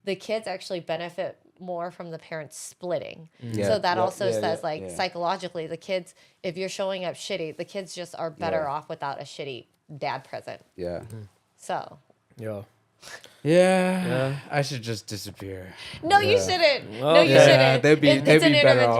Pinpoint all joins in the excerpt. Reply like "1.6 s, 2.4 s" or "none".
none